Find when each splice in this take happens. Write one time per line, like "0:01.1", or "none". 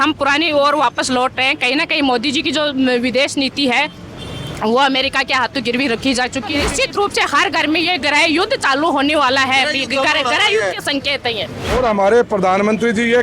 0:06.7
0:11.7